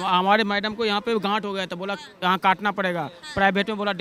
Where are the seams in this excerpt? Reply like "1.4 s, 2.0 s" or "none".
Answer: none

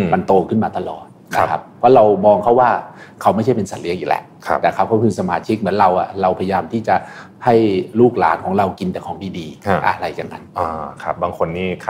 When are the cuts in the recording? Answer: none

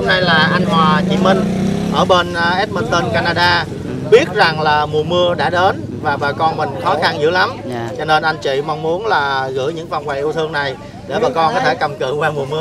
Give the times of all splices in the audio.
none

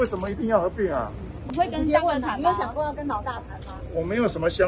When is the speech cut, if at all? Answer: 1.3 s

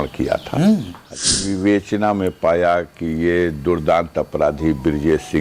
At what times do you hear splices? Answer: 1.3 s

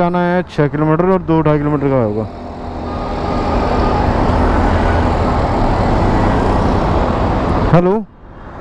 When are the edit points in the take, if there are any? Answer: none

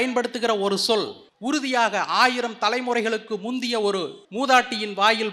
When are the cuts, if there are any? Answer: 1.2 s, 4.2 s

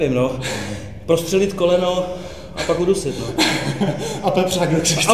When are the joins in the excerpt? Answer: none

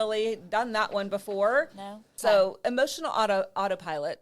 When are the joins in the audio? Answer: 2.1 s

